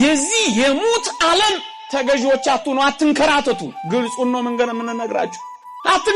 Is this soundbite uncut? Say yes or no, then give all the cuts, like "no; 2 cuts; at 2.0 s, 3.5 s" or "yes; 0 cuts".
yes; 0 cuts